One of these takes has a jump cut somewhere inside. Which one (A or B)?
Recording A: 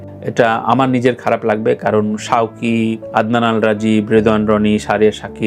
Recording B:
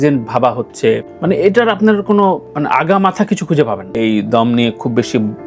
B